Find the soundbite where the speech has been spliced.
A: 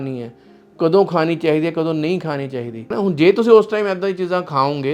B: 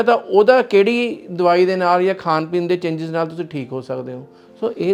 A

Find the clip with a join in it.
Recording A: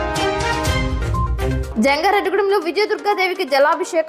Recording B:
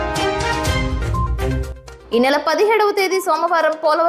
B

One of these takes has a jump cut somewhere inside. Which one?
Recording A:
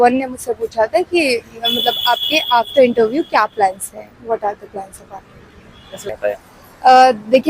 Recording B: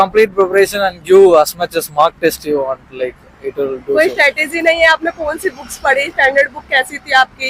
A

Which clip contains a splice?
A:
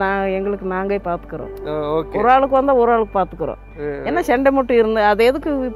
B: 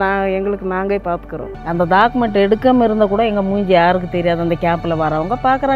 B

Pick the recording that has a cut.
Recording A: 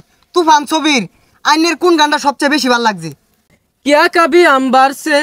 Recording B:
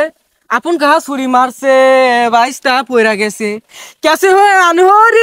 A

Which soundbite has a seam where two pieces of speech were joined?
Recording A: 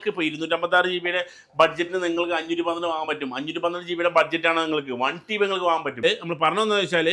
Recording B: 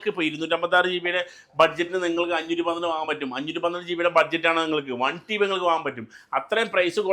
A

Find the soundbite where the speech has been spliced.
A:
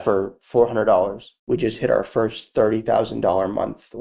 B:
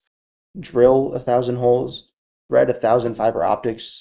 A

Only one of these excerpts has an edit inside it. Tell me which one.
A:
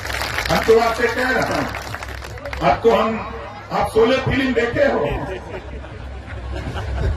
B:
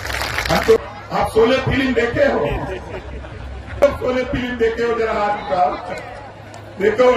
B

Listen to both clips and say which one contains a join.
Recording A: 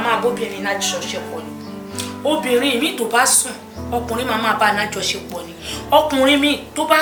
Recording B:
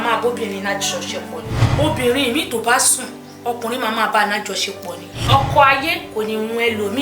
B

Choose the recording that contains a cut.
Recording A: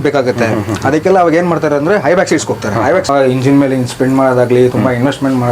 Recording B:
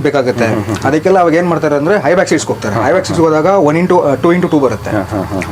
A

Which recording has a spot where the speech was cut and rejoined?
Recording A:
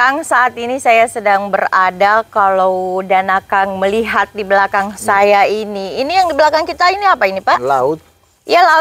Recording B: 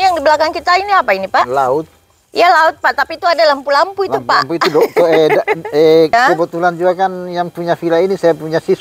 B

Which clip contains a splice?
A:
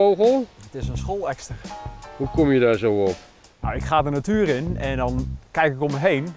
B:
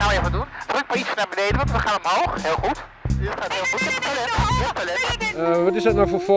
B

